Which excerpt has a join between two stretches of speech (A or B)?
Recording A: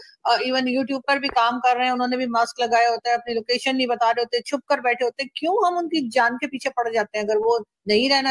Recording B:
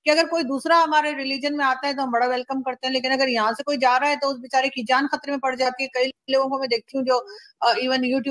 B